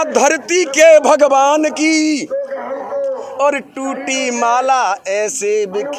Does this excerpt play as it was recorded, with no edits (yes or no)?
yes